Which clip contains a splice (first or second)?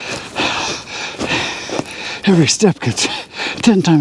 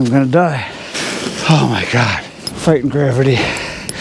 second